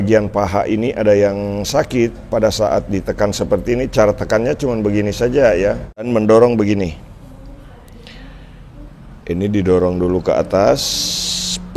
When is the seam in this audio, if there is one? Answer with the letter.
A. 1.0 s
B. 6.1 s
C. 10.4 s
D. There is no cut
B